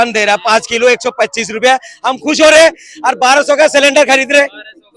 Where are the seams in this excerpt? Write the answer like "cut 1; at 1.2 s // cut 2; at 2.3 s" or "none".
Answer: none